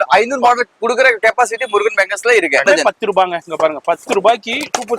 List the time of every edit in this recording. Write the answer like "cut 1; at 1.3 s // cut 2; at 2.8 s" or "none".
cut 1; at 2.7 s